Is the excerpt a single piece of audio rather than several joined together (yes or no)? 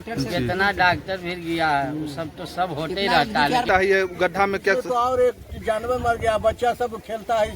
no